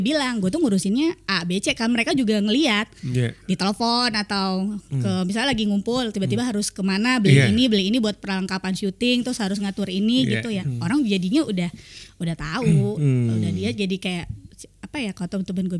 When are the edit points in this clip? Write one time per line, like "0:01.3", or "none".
none

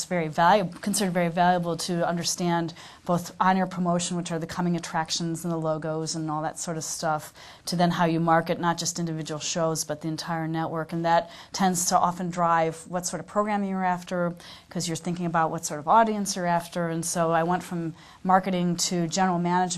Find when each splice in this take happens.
0:18.4

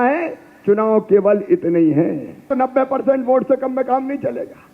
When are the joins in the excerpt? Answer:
0:02.5

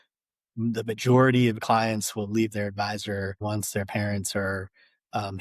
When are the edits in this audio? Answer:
0:03.4

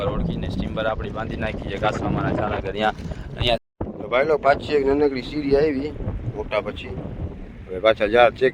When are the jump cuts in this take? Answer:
0:03.6

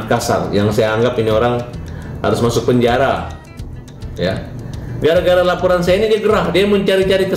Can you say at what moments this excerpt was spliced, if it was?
none

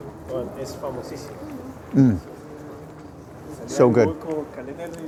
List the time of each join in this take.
none

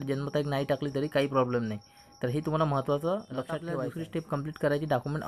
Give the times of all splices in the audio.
0:03.7

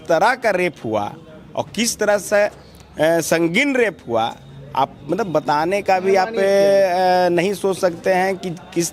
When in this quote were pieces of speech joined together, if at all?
none

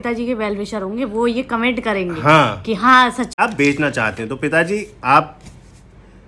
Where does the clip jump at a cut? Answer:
0:03.3

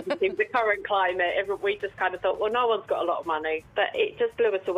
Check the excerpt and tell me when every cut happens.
0:03.6

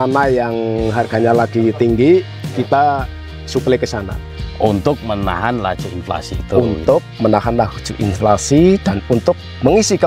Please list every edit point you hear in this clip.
0:04.2

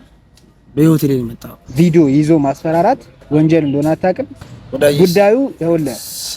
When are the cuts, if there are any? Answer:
0:01.6

